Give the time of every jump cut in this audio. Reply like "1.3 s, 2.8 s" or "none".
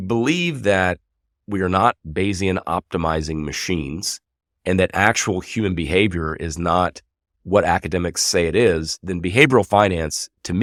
none

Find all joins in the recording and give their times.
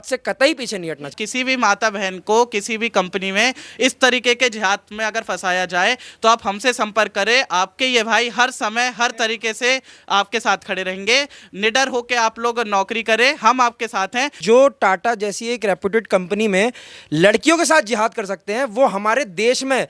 1.2 s, 14.3 s

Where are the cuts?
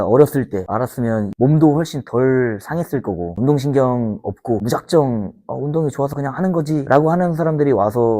1.3 s, 3.3 s

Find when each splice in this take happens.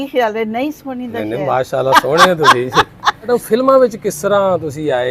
3.3 s

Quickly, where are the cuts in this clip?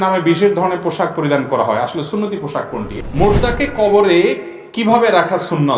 2.9 s

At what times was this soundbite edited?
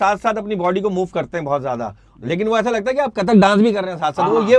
none

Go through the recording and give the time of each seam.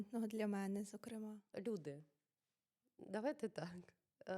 1.5 s

